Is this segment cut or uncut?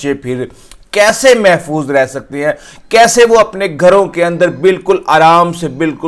uncut